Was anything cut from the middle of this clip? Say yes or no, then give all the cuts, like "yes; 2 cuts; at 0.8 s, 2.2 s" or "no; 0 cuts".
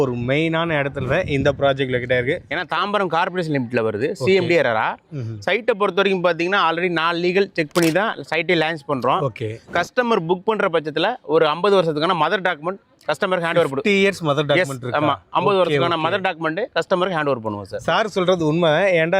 yes; 2 cuts; at 2.5 s, 17.7 s